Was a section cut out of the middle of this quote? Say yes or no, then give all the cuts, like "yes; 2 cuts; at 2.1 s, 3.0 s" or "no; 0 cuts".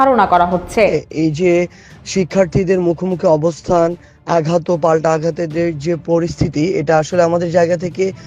yes; 1 cut; at 1.0 s